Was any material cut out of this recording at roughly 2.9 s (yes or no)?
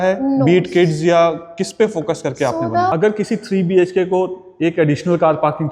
yes